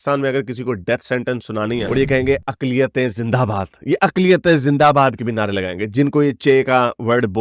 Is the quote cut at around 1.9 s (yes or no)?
yes